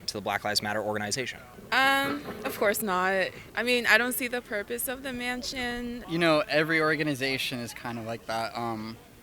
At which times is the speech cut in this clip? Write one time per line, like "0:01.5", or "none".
0:01.5
0:03.4
0:06.0